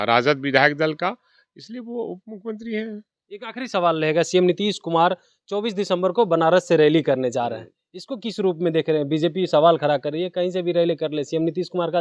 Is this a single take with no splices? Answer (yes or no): yes